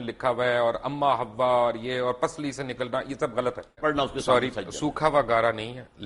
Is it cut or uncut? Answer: cut